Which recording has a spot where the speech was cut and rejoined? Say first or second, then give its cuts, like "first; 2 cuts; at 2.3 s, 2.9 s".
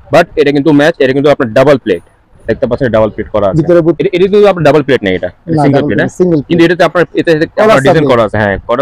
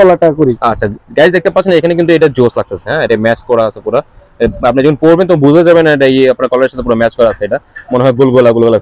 first; 1 cut; at 4.0 s